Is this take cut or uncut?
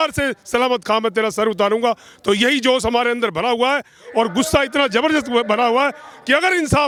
uncut